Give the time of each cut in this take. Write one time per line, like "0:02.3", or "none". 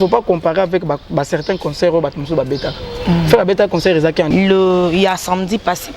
0:04.3